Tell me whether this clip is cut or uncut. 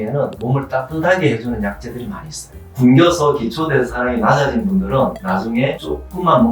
cut